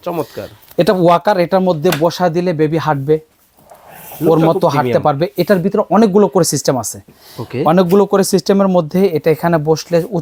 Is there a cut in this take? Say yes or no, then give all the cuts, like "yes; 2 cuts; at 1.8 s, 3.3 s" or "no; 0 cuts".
no; 0 cuts